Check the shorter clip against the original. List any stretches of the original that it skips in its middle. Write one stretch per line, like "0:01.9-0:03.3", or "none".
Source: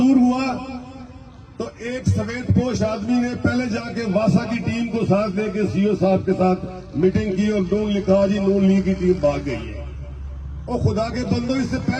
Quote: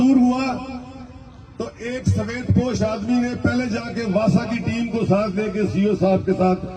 none